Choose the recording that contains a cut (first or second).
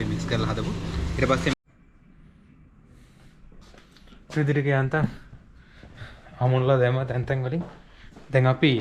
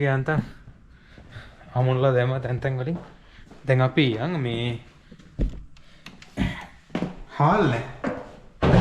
first